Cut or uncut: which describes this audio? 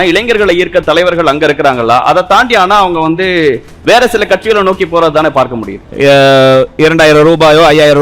cut